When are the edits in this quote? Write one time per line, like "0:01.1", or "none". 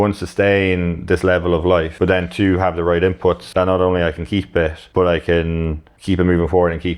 0:01.9
0:03.4
0:04.8
0:05.9